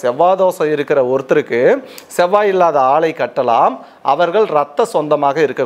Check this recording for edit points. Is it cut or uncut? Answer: uncut